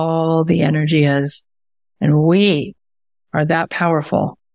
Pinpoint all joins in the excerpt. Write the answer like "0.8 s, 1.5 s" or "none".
none